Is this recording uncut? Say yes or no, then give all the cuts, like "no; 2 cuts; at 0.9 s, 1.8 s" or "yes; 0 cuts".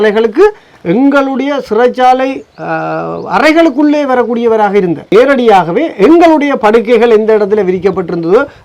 no; 1 cut; at 5.1 s